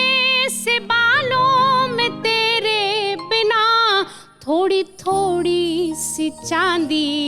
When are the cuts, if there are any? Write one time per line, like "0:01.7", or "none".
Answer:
none